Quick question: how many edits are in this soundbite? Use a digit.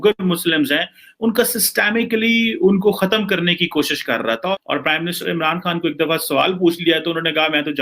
1